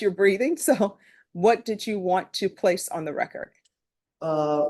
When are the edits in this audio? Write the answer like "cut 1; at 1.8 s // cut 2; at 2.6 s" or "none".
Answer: none